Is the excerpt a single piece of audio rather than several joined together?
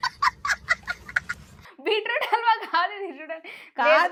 yes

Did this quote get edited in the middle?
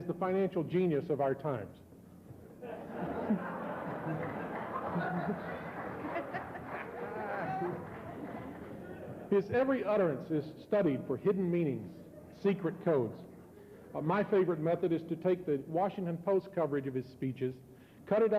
yes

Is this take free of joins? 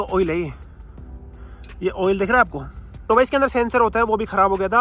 no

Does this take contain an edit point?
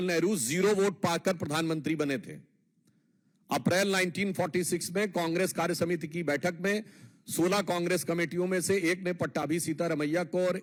no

